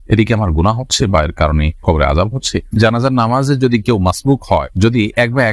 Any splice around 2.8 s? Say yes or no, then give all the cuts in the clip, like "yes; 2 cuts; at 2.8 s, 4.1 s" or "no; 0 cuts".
yes; 1 cut; at 2.8 s